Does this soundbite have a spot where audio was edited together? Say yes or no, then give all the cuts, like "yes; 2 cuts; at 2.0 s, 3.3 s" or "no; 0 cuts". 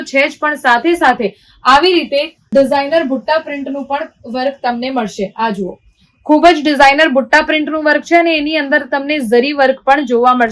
no; 0 cuts